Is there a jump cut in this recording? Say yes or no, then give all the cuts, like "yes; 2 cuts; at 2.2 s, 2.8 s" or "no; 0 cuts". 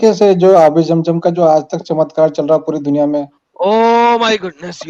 no; 0 cuts